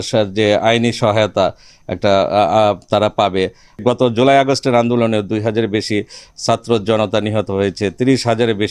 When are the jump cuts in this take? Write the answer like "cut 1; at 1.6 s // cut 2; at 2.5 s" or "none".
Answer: cut 1; at 3.8 s